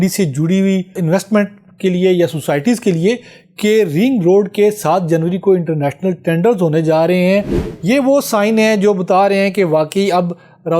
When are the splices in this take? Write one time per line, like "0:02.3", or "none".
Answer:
0:01.0
0:07.6